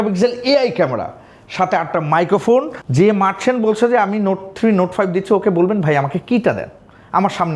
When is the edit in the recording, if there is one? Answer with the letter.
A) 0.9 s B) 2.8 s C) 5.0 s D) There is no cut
B